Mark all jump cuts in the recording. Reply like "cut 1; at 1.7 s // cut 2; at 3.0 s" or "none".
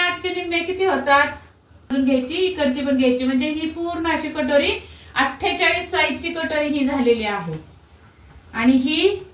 cut 1; at 1.9 s